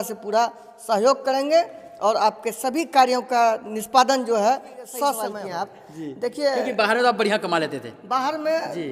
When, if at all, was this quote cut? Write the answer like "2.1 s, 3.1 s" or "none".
5.3 s